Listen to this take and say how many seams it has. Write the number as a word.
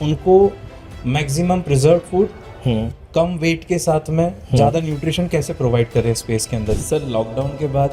one